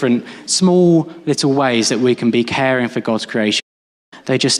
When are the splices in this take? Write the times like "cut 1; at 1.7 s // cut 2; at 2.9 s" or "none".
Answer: cut 1; at 3.6 s